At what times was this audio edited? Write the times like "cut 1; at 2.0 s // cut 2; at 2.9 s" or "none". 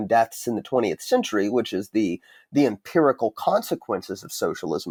none